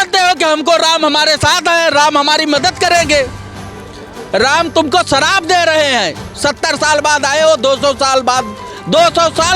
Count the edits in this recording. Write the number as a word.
zero